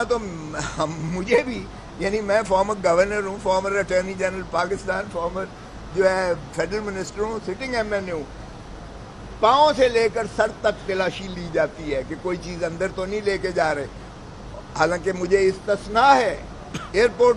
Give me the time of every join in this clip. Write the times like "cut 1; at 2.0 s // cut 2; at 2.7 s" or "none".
none

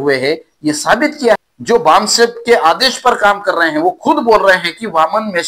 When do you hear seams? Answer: cut 1; at 1.4 s

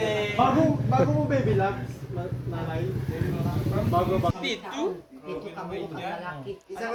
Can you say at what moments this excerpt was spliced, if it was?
none

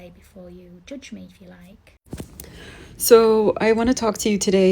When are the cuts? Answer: cut 1; at 1.9 s

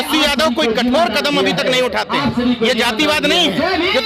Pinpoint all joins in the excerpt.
none

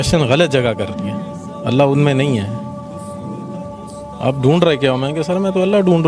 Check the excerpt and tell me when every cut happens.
none

